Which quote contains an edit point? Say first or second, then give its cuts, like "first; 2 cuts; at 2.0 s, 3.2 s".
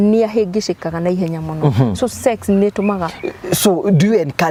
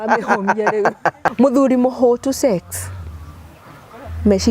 second; 1 cut; at 1.2 s